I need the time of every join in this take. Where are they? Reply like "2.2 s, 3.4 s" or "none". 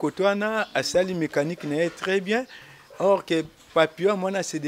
none